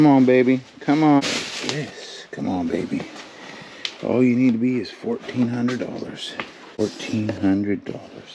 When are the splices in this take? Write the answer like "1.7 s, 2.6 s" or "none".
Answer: 1.2 s, 6.8 s